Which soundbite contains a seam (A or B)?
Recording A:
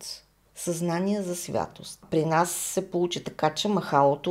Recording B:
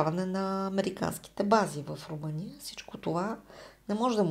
A